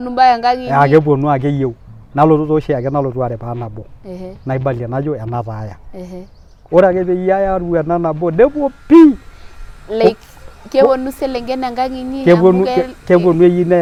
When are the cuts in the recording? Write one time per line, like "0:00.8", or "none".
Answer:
none